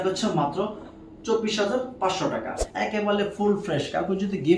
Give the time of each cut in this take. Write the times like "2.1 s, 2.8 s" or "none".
2.6 s